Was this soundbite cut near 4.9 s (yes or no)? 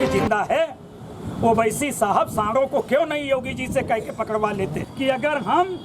yes